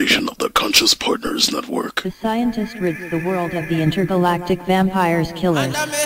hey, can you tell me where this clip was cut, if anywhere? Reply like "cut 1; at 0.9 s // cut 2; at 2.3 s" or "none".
cut 1; at 2.0 s